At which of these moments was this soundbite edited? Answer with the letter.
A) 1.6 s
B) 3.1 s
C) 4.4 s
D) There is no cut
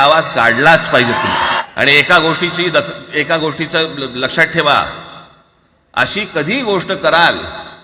A